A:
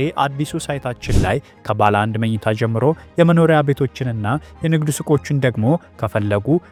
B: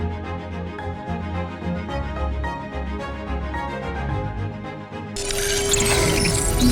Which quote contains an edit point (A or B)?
B